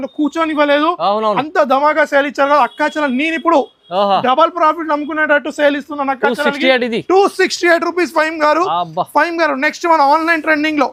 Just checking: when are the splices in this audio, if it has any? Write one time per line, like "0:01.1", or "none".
none